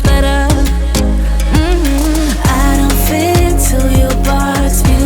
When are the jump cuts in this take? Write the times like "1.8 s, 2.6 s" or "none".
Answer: none